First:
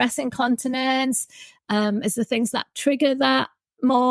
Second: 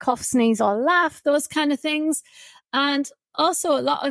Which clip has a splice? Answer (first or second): second